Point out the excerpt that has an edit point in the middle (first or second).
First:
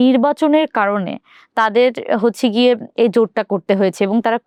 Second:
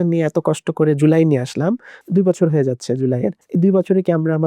second